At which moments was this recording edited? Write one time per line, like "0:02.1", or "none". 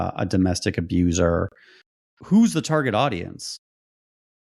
0:01.8